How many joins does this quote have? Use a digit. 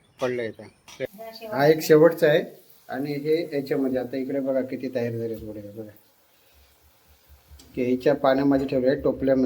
1